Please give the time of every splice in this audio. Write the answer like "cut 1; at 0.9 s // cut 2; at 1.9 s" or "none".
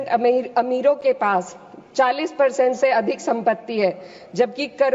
none